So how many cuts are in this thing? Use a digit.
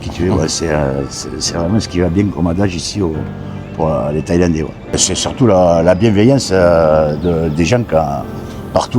1